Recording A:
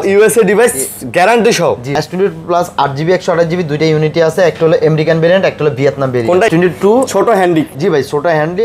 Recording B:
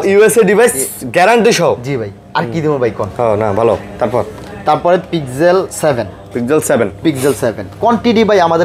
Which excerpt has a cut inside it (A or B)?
A